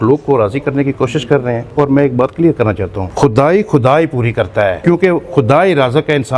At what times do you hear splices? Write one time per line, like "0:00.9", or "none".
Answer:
0:01.6
0:03.0
0:04.8